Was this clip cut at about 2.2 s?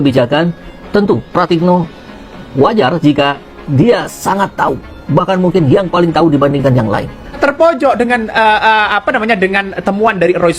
no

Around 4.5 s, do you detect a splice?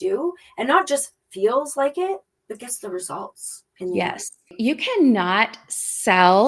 yes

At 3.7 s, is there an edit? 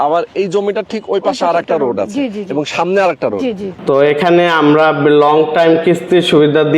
yes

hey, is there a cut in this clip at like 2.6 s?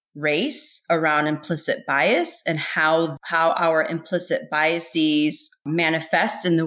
no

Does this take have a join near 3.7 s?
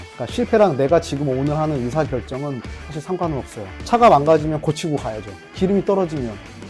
yes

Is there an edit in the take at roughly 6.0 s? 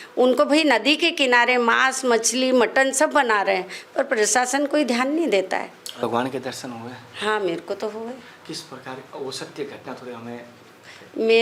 yes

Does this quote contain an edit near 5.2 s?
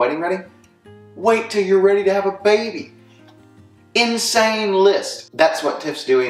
no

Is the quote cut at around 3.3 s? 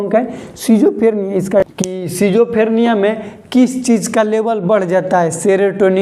no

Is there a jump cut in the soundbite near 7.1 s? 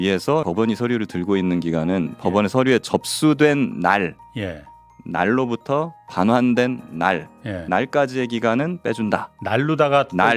no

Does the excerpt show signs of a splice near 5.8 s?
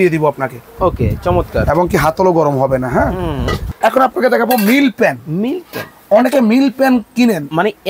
no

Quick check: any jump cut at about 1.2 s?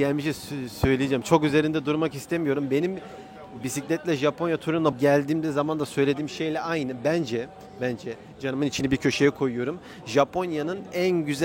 no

